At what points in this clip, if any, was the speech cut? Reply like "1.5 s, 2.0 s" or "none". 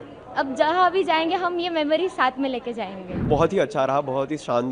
3.3 s